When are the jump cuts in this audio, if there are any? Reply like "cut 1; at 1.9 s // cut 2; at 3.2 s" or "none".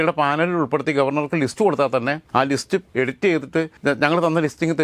cut 1; at 2.7 s // cut 2; at 3.7 s

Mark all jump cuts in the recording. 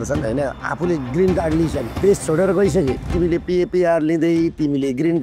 cut 1; at 1.9 s // cut 2; at 3.0 s

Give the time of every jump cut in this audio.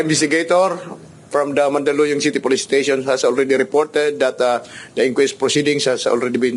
none

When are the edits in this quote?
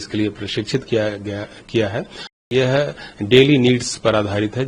cut 1; at 2.3 s

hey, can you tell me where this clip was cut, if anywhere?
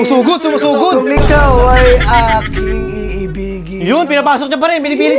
none

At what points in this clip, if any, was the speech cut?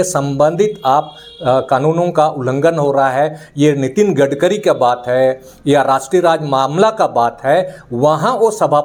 none

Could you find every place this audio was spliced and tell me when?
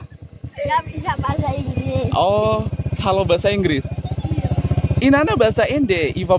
none

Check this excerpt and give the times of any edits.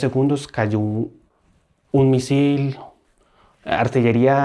none

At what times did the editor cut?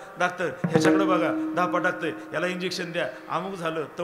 none

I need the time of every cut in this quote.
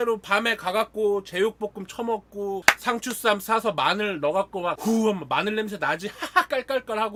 none

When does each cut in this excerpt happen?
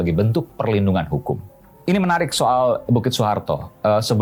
none

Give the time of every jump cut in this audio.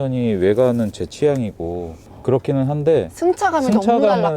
cut 1; at 2.1 s

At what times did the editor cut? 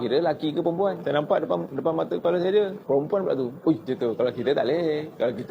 cut 1; at 3.8 s

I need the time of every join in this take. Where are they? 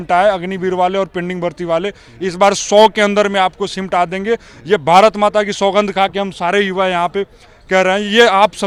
none

